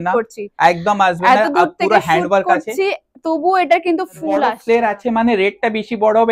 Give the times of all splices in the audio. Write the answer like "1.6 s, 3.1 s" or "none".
4.6 s